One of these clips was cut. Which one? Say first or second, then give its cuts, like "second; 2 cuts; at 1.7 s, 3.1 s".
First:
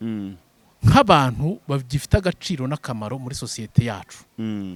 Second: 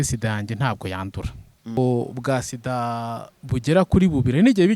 second; 1 cut; at 1.8 s